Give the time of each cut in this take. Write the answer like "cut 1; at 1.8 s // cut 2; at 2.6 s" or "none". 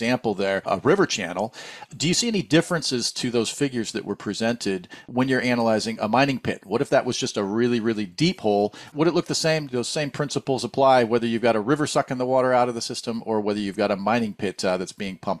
cut 1; at 5.1 s